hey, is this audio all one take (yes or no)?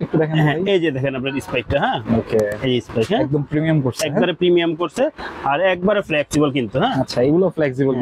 yes